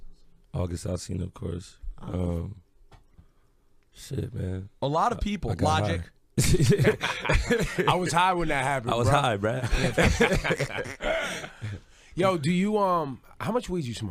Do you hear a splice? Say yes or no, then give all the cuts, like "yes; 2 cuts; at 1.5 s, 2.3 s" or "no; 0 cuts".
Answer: yes; 1 cut; at 4.3 s